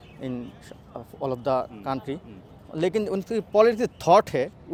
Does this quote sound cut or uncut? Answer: uncut